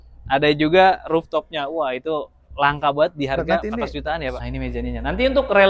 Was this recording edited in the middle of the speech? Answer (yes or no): yes